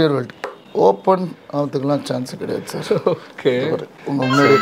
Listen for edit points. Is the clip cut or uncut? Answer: uncut